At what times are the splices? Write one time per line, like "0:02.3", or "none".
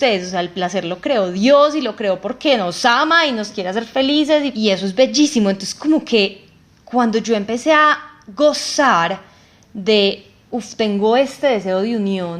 0:04.5

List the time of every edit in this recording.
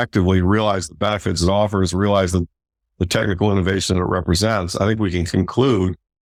none

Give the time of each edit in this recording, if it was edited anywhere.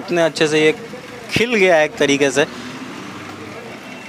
none

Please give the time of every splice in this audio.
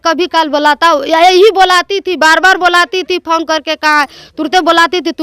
none

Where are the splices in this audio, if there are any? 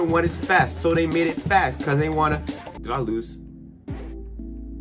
0:02.7

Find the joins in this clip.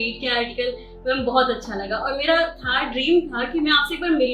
none

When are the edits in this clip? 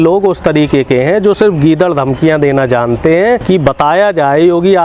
0:03.4

